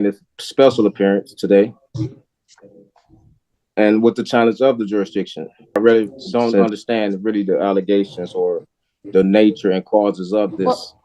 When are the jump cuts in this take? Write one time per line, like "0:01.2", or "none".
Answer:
0:05.8